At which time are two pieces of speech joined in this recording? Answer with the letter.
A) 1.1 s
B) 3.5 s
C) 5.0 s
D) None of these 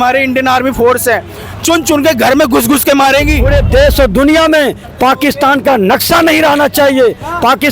B